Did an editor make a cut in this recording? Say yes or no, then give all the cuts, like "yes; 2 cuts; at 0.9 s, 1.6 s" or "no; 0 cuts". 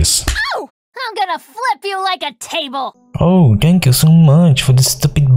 yes; 1 cut; at 2.9 s